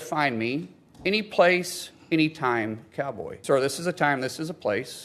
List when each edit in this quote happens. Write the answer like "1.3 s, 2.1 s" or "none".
3.3 s